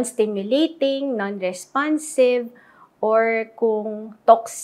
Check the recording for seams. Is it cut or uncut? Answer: uncut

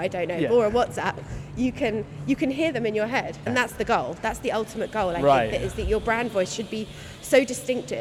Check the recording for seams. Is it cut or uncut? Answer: cut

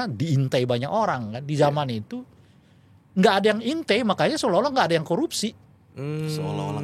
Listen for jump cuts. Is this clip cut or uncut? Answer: uncut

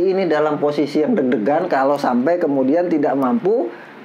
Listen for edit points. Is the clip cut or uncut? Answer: uncut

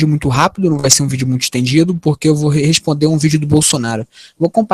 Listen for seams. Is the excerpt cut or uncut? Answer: uncut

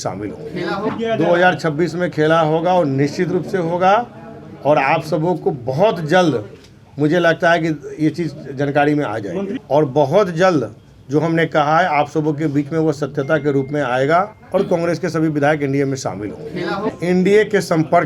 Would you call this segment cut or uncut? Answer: cut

